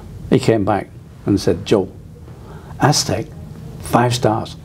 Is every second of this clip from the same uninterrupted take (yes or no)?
yes